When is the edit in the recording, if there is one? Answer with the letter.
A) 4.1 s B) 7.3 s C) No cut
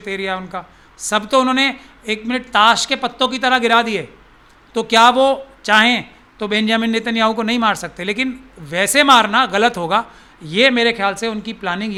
C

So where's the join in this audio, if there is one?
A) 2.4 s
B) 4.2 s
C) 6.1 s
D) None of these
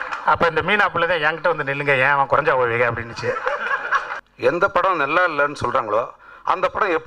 B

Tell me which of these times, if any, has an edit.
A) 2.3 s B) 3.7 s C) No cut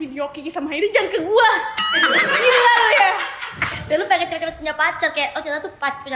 B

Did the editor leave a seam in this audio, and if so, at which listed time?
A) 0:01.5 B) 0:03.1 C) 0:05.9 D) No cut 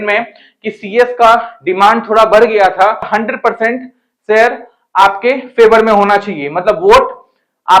B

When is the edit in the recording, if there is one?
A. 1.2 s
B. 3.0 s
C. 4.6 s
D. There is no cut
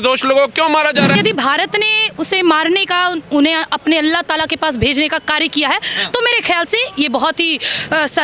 A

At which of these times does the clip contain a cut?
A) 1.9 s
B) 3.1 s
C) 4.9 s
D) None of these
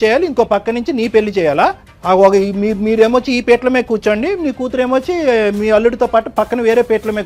A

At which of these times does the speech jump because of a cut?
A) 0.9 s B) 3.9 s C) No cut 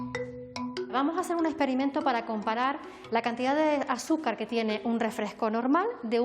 A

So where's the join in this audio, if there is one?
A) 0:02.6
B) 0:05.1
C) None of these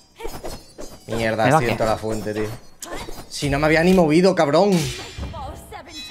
C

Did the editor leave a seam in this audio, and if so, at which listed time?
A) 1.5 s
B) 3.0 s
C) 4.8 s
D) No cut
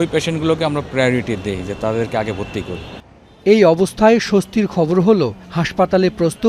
D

